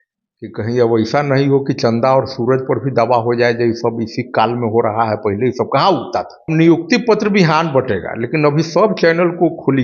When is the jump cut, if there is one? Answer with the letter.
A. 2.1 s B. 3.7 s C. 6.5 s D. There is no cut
C